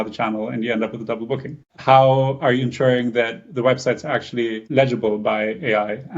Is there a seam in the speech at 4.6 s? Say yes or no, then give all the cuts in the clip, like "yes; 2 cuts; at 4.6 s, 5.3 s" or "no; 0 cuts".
yes; 2 cuts; at 1.7 s, 4.6 s